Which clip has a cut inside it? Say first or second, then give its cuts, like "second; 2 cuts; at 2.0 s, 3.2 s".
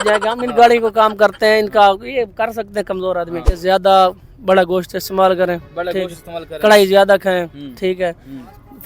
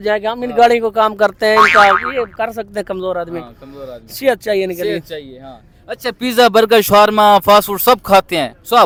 first; 1 cut; at 3.5 s